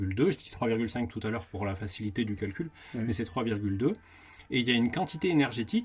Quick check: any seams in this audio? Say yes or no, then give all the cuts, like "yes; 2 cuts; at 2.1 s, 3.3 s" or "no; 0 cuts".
no; 0 cuts